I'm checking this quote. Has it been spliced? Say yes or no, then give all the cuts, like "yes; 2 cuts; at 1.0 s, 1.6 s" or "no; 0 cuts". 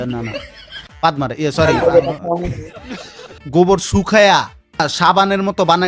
yes; 2 cuts; at 3.3 s, 4.8 s